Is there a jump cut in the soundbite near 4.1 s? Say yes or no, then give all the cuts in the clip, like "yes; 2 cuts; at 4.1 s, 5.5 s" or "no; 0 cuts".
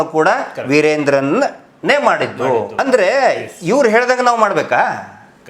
no; 1 cut; at 2.7 s